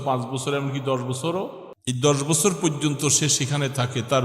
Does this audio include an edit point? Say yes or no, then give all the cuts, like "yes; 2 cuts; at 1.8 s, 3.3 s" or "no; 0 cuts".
yes; 1 cut; at 1.7 s